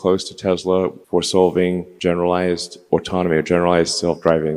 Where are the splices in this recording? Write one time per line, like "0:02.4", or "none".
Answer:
0:01.0
0:01.9
0:02.9